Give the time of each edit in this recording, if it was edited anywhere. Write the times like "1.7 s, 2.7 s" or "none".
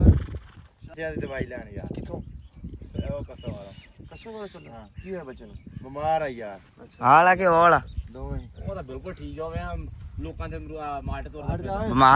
1.0 s